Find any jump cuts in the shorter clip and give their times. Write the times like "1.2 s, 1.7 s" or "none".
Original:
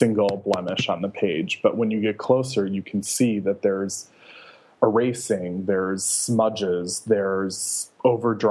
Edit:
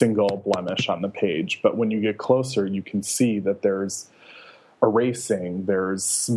none